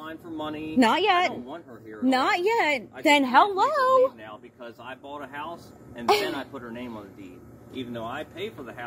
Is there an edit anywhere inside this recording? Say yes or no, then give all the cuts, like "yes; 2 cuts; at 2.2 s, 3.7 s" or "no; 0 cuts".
no; 0 cuts